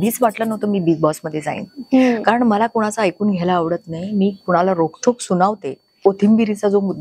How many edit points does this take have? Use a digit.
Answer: 1